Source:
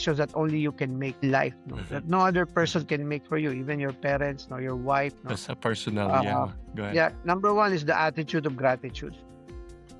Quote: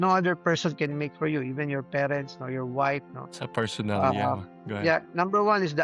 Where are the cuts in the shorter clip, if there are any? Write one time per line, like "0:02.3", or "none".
none